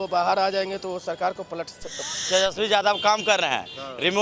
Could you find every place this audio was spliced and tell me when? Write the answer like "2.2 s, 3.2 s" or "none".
2.2 s